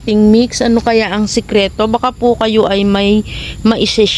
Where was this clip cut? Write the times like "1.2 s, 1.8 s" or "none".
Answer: none

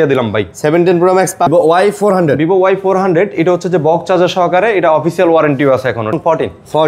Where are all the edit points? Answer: 1.5 s, 6.1 s

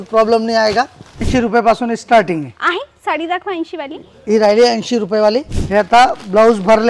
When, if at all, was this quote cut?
1.2 s, 5.6 s

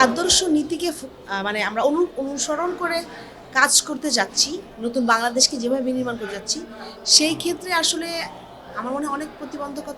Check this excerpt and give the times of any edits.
none

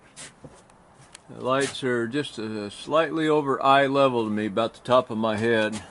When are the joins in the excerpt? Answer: none

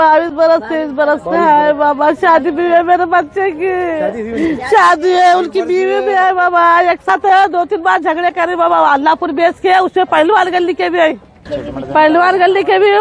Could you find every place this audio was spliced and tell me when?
7.1 s, 11.6 s

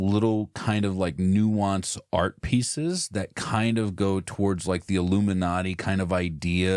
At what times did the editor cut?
none

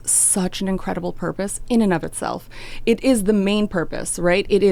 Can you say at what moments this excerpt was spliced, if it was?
none

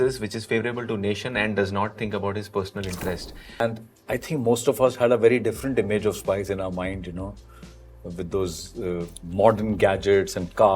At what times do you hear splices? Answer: 3.6 s

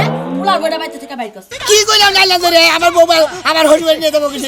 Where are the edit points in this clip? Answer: 1.5 s

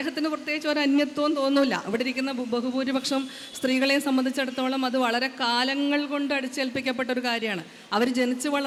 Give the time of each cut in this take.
none

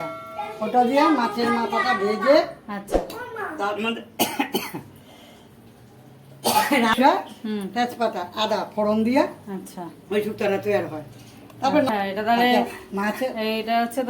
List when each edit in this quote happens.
11.9 s

